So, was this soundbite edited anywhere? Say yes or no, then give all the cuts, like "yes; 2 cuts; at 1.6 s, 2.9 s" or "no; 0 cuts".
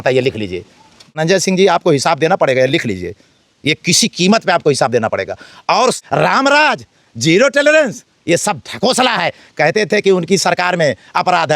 yes; 2 cuts; at 1.2 s, 6.0 s